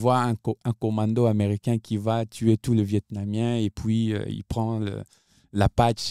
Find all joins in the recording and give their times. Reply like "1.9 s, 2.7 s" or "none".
none